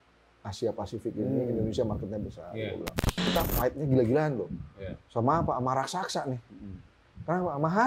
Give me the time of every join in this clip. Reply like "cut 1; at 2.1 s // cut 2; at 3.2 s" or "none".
cut 1; at 3.2 s